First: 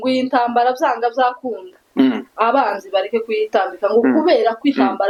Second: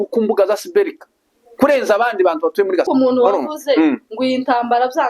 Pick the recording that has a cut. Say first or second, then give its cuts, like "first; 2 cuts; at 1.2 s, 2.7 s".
second; 1 cut; at 2.9 s